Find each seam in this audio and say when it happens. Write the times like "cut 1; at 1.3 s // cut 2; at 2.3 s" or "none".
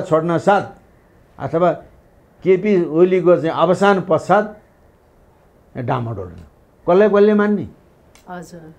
none

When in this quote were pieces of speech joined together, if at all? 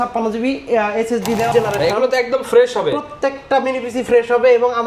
cut 1; at 1.5 s

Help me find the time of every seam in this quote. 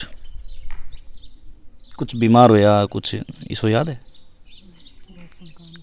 none

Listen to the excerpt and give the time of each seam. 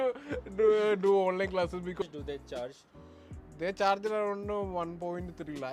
cut 1; at 2.0 s

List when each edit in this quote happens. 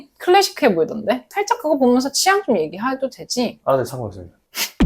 cut 1; at 1.3 s

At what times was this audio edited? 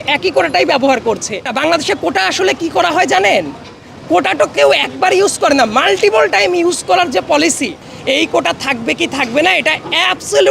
cut 1; at 1.5 s // cut 2; at 7.9 s

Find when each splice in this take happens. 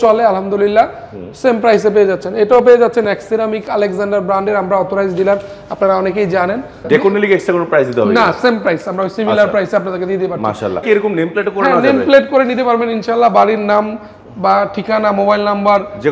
cut 1; at 6.8 s // cut 2; at 10.8 s

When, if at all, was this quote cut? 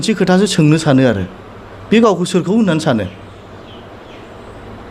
none

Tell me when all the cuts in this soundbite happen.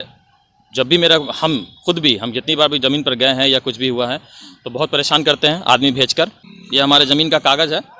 cut 1; at 6.5 s

